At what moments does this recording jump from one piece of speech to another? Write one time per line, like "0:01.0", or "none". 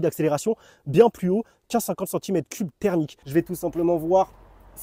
0:03.2